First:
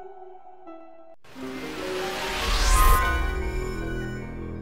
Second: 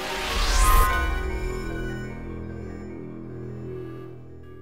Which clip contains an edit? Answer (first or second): first